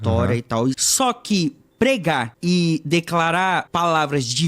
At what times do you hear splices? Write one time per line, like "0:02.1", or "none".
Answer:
0:00.9
0:02.3
0:03.7